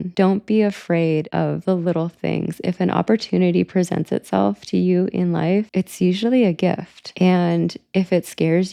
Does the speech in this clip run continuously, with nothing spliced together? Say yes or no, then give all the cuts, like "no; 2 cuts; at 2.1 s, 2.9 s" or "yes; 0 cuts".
yes; 0 cuts